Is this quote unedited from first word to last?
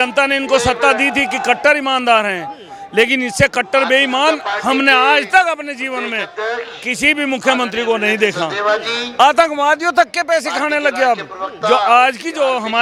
yes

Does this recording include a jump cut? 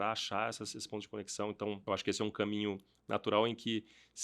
yes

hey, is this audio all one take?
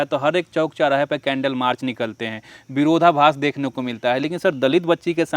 yes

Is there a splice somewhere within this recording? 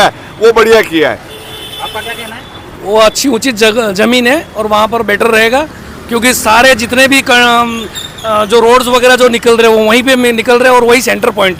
no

